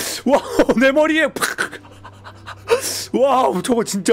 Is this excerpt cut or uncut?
uncut